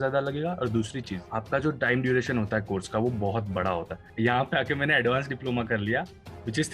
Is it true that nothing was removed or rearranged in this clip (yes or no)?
no